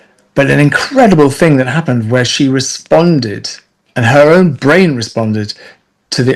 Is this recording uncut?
yes; 0 cuts

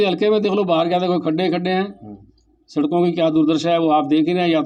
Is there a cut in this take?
no; 0 cuts

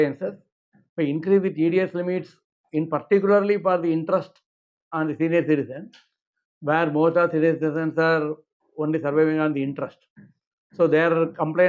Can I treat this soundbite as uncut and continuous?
yes; 0 cuts

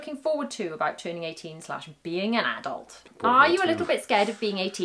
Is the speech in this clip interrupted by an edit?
yes; 1 cut; at 3.0 s

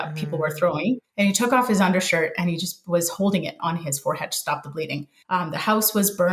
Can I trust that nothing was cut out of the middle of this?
no; 2 cuts; at 1.1 s, 5.1 s

